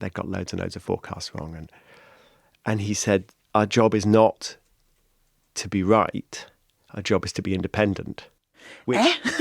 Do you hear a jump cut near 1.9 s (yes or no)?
no